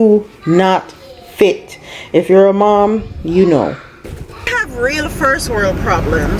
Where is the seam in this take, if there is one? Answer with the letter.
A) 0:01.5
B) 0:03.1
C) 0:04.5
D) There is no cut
C